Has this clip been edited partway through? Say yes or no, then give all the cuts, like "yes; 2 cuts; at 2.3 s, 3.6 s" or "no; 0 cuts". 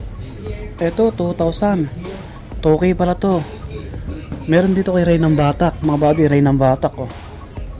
no; 0 cuts